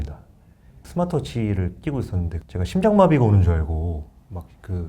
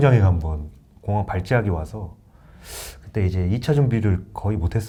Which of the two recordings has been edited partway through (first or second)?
first